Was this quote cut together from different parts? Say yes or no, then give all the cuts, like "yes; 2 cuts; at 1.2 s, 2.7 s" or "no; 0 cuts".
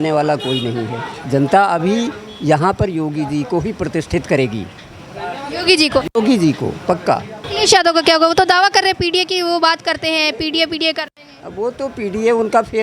yes; 2 cuts; at 1.1 s, 7.4 s